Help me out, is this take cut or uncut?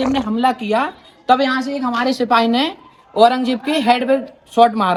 uncut